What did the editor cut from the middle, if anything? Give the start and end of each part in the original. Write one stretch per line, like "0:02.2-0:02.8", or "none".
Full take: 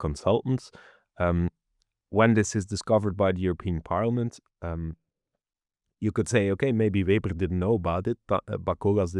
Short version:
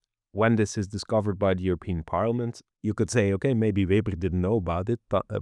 0:04.4-0:05.8

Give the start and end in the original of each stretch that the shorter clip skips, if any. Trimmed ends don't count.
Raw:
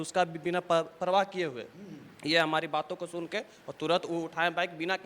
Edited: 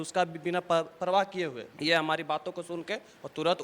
0:01.7-0:02.1

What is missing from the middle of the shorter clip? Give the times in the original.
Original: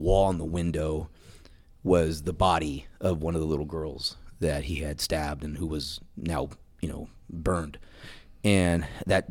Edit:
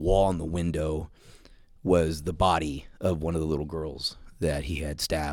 none

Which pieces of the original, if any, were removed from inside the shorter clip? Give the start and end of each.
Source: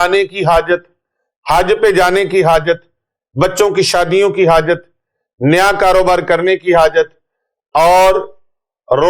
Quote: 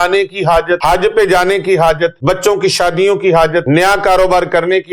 0:00.8-0:01.5
0:02.8-0:03.3
0:04.8-0:05.4

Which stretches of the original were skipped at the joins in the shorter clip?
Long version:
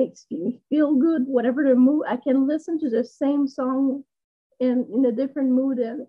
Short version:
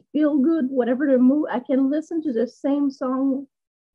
none

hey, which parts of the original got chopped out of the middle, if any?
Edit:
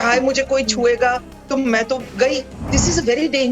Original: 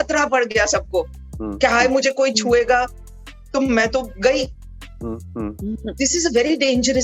0:03.0-0:03.4
0:04.6-0:05.9

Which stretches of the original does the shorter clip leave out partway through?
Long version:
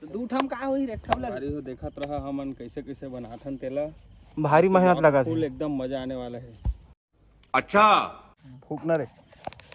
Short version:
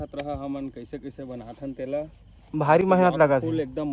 none

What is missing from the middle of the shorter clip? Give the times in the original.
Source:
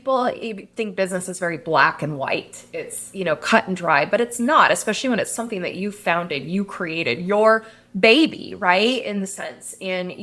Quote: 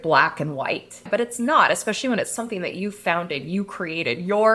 0:02.7-0:04.1

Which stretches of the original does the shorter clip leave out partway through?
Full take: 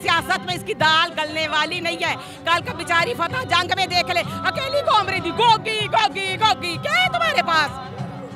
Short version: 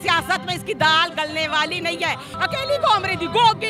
0:02.3-0:04.3

